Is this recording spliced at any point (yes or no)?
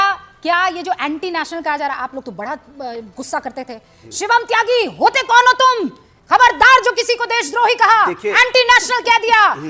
no